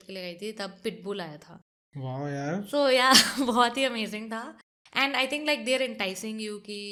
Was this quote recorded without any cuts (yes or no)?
yes